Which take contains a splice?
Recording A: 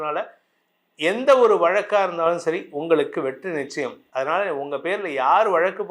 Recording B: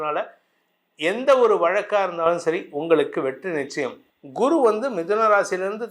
B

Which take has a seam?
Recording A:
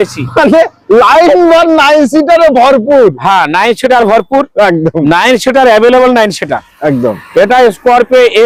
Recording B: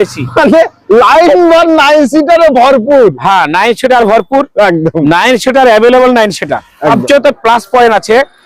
B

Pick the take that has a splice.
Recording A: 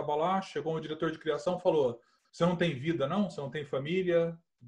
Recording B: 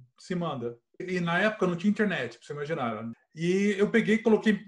B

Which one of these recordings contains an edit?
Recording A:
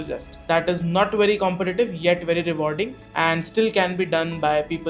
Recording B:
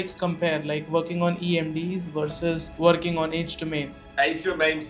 B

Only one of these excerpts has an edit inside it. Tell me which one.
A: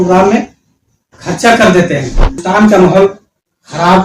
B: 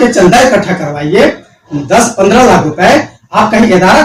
A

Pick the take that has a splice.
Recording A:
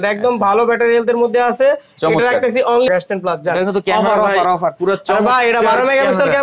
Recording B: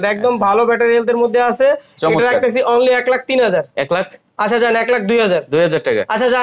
A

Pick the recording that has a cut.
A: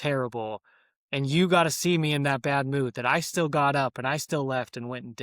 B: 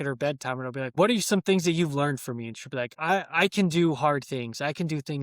B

